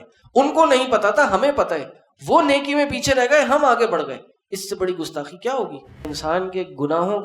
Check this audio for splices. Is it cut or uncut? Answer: cut